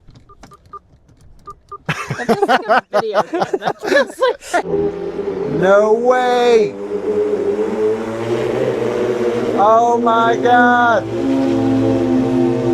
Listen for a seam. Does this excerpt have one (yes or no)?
yes